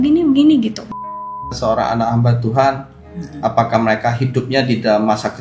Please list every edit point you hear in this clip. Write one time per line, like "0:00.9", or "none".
0:01.3